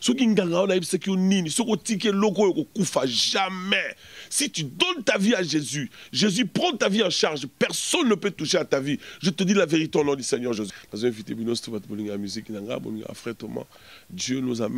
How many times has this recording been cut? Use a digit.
1